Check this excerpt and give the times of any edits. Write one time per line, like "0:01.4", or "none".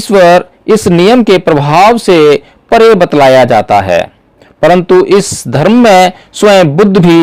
none